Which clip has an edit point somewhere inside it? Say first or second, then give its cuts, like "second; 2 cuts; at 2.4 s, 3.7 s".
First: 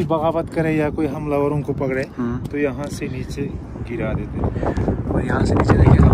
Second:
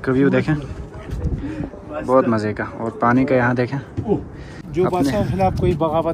second; 1 cut; at 4.6 s